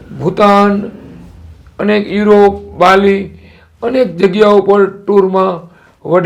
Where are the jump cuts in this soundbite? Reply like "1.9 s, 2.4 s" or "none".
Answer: none